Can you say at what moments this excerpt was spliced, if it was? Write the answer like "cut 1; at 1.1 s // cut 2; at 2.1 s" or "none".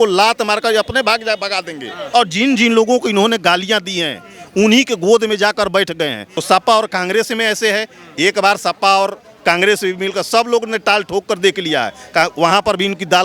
cut 1; at 2.0 s // cut 2; at 6.3 s